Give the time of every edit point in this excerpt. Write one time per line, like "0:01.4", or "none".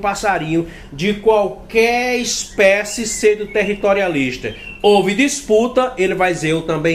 none